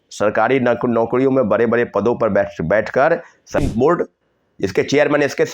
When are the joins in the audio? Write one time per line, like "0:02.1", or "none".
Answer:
0:03.6